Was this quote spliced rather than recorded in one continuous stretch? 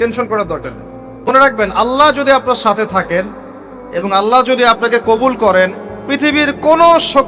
yes; 1 cut; at 1.3 s

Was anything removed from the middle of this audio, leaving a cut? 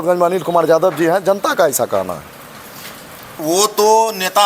yes; 1 cut; at 3.3 s

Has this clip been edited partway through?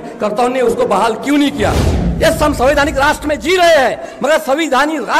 yes; 1 cut; at 1.9 s

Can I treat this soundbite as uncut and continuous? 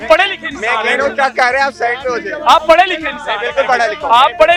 yes; 0 cuts

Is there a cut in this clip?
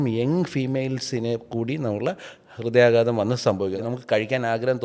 yes; 1 cut; at 3.8 s

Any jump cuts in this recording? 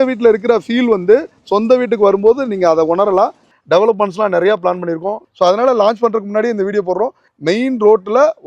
yes; 3 cuts; at 3.5 s, 5.2 s, 7.2 s

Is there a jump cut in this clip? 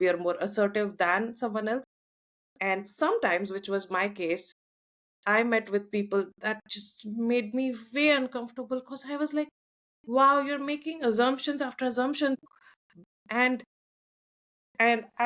yes; 1 cut; at 12.4 s

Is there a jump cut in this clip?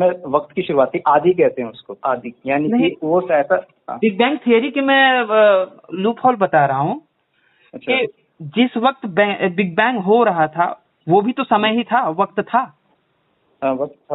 no; 0 cuts

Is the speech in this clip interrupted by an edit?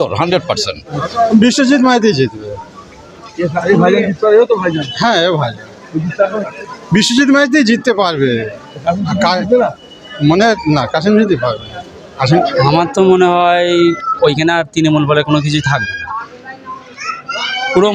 yes; 2 cuts; at 1.0 s, 12.2 s

